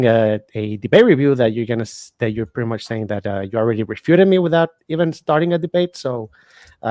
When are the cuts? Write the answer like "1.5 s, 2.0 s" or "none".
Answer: none